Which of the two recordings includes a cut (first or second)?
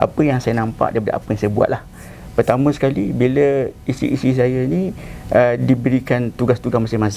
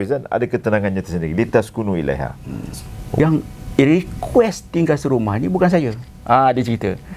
second